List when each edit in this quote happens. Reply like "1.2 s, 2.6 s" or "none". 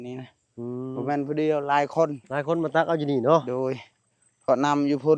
none